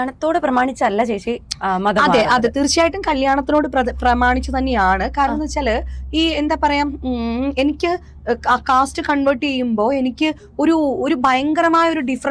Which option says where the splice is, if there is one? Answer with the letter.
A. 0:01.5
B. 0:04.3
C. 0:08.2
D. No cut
D